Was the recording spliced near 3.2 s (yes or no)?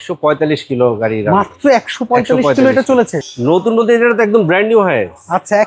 yes